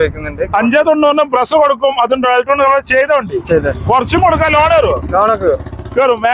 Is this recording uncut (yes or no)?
yes